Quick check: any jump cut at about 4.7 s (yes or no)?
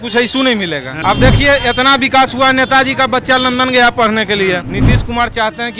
yes